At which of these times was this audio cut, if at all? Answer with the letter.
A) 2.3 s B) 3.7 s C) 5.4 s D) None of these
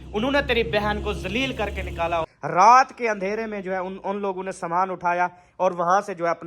A